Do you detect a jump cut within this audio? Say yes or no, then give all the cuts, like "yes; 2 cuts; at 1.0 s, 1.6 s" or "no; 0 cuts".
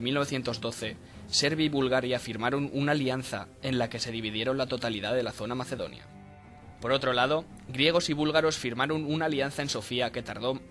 no; 0 cuts